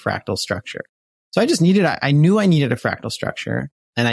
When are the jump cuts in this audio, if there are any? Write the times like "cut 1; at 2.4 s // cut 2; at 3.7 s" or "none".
none